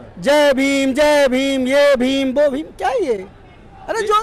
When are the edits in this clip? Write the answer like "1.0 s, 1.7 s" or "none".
none